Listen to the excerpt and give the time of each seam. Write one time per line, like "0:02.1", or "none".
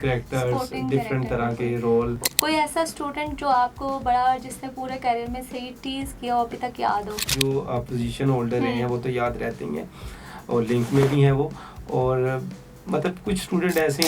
0:02.2
0:07.3

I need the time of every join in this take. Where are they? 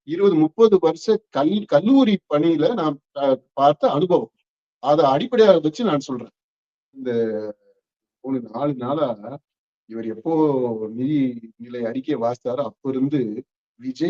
0:07.0

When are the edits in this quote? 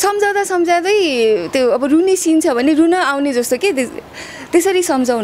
none

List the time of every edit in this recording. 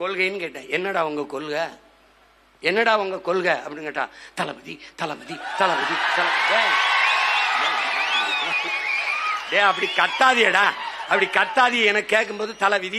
none

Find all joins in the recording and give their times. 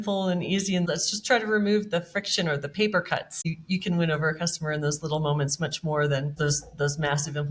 0:00.8
0:03.5
0:06.3

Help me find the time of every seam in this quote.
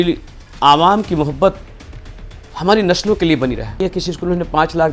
0:03.8

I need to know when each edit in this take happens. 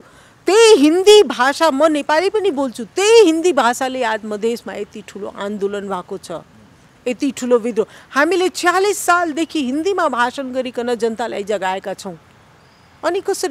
none

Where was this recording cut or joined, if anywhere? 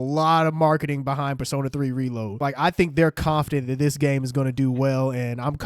0:02.4

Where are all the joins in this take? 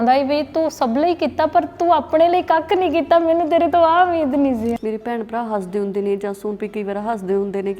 0:04.8

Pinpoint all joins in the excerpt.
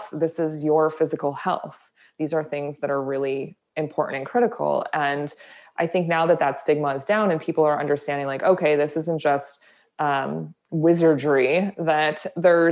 none

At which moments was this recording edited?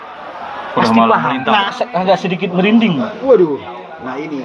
0:01.7

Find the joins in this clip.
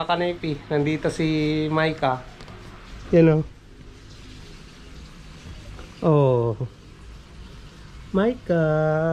none

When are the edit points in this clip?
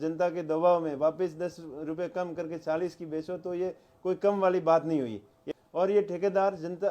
0:05.4

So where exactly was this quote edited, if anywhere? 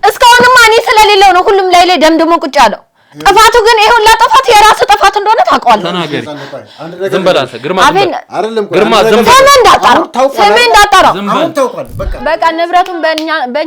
0:12.1

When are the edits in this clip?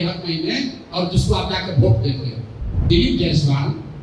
0:02.8

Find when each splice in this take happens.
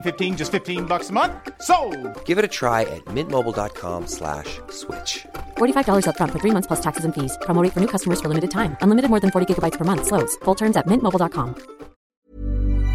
0:12.0

